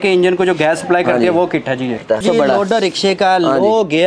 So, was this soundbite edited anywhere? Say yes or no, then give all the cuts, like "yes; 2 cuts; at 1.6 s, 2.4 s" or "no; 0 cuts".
yes; 1 cut; at 2.2 s